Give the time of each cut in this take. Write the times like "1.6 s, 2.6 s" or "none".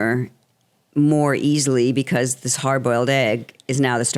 none